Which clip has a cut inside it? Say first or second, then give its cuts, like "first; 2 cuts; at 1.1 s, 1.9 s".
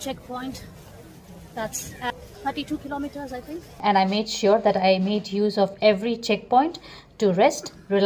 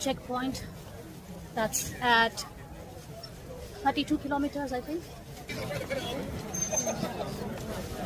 first; 2 cuts; at 2.1 s, 3.7 s